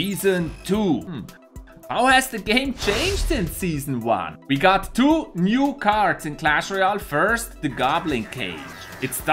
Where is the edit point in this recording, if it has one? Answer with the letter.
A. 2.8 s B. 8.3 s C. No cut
A